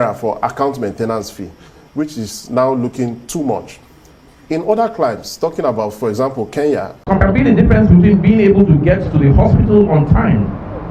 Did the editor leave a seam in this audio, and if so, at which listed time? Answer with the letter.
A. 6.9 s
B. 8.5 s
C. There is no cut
A